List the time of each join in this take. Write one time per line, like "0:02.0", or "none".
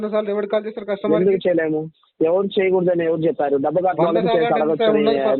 none